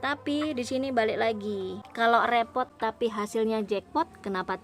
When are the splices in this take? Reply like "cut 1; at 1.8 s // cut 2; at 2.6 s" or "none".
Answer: cut 1; at 1.8 s // cut 2; at 2.7 s